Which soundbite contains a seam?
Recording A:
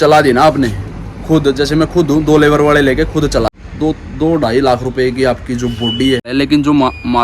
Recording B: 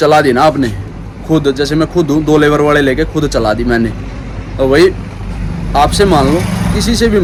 A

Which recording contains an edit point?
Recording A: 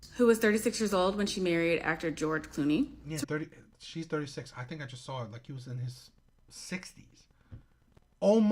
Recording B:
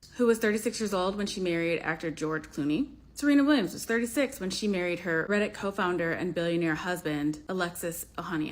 B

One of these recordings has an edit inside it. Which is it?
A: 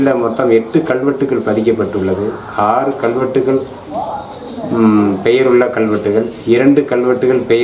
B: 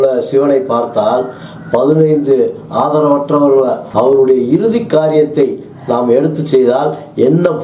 B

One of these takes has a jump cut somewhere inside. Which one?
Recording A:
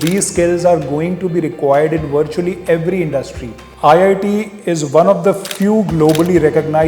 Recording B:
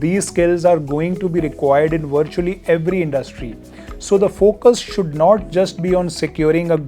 A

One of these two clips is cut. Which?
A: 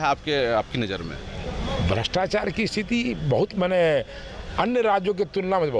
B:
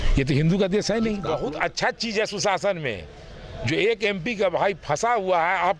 B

